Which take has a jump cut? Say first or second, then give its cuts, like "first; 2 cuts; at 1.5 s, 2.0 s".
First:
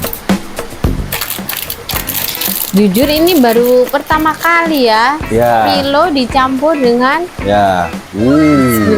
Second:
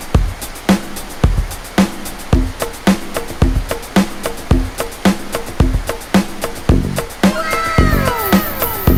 first; 1 cut; at 8.0 s